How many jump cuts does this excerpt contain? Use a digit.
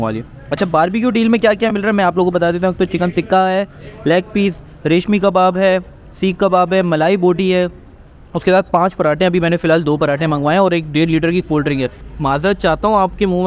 1